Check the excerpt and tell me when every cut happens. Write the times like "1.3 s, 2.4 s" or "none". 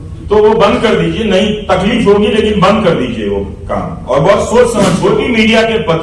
5.0 s

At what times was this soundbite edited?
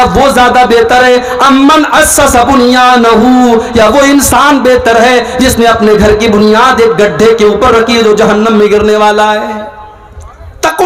none

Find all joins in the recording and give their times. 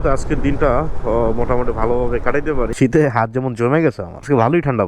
2.7 s

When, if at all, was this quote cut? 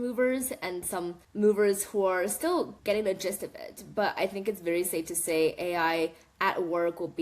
1.2 s, 2.8 s

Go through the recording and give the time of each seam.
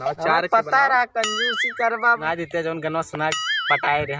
2.2 s

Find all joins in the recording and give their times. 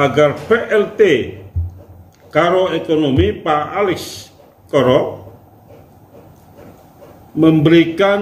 none

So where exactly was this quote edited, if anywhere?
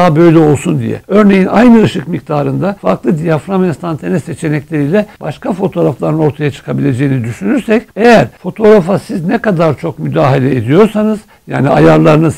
none

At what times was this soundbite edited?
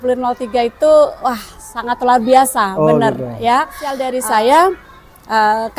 4.1 s

